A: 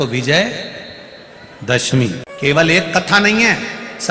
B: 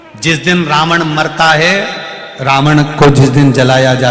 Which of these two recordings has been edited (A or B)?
A